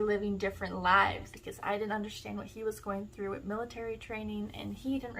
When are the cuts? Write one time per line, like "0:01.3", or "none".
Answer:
0:01.3